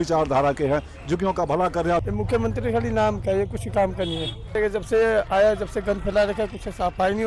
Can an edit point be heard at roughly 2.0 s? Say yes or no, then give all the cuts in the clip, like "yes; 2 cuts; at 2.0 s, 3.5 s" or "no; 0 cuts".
yes; 2 cuts; at 2.0 s, 4.6 s